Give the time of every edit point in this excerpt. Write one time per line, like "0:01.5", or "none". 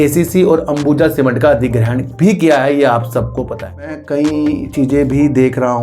0:04.0